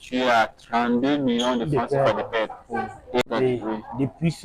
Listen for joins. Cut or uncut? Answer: cut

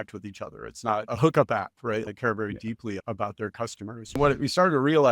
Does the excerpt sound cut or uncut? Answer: cut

